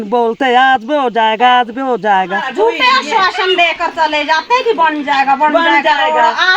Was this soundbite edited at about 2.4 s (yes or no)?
yes